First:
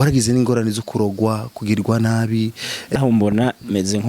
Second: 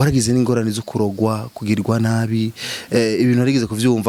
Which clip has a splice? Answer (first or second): first